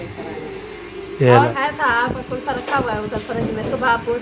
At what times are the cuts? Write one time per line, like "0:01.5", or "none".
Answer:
0:01.5